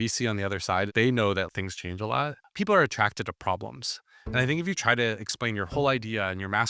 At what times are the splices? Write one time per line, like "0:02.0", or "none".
0:02.4